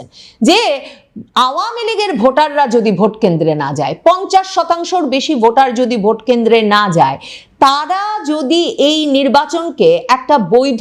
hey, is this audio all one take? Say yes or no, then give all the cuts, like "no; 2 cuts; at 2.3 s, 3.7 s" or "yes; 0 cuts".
yes; 0 cuts